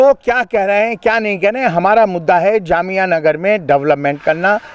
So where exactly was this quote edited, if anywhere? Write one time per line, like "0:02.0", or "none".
none